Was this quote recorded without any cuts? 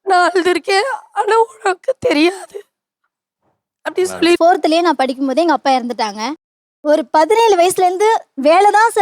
no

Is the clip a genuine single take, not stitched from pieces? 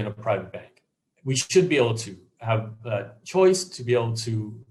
yes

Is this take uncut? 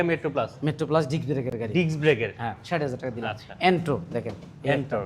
yes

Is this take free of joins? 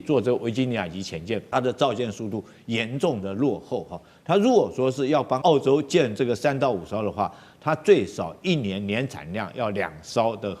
no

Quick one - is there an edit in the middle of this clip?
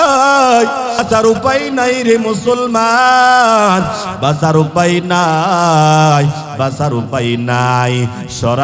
yes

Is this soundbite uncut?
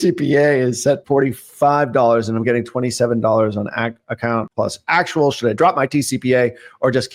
no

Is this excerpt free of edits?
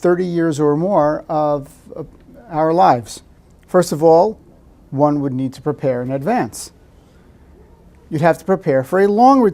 no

